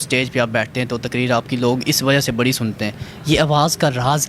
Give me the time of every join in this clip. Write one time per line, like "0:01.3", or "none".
none